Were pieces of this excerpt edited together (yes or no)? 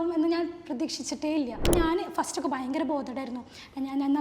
yes